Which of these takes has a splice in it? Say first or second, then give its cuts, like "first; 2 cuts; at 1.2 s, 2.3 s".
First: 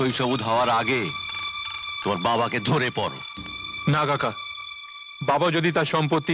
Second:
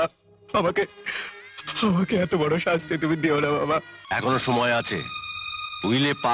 second; 1 cut; at 4.0 s